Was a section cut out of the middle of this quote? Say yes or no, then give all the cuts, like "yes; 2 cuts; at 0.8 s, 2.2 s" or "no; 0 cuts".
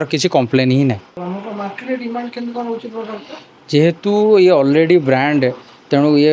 yes; 1 cut; at 1.2 s